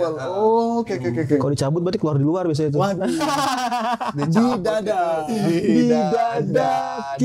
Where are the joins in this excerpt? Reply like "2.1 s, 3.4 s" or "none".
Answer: none

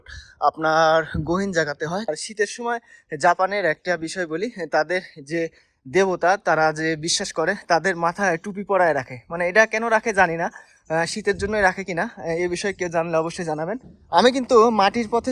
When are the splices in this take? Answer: 2.1 s, 13.9 s

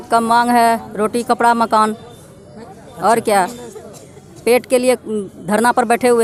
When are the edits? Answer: none

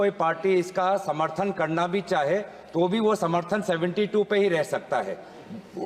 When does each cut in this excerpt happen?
none

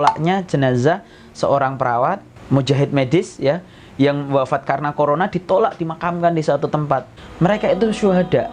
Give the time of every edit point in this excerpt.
7.2 s

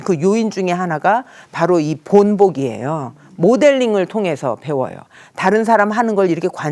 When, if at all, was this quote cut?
none

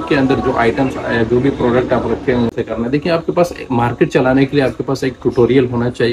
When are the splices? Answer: 2.5 s

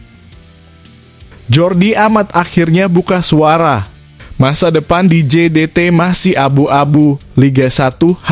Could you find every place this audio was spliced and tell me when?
1.5 s

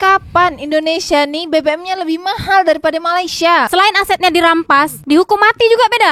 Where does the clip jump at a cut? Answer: 3.7 s

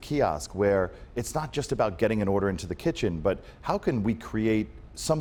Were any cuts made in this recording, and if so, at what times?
none

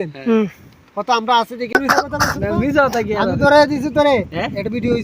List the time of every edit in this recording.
1.7 s

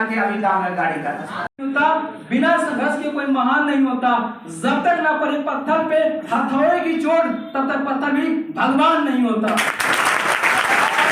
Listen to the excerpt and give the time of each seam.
1.5 s

